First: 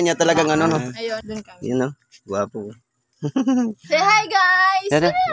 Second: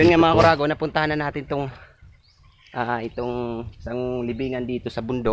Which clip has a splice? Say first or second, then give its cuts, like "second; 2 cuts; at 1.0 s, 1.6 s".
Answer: first; 1 cut; at 1.2 s